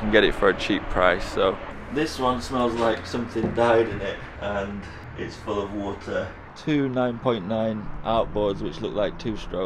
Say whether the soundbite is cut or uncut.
cut